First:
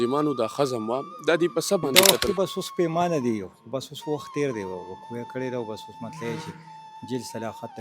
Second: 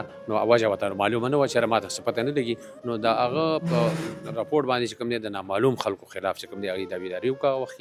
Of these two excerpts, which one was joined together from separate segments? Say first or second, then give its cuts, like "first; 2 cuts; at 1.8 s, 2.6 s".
first; 1 cut; at 1.9 s